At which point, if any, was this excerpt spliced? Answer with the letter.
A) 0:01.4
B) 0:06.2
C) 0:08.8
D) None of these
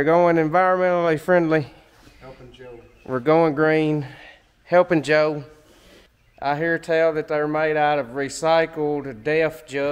D